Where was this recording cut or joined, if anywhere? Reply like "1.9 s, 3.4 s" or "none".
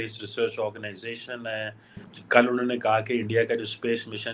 2.1 s